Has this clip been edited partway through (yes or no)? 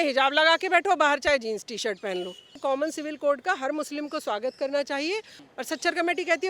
yes